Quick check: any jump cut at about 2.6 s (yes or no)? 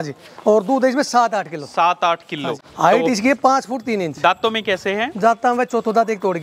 yes